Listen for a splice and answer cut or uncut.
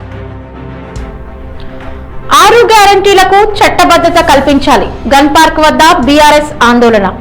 cut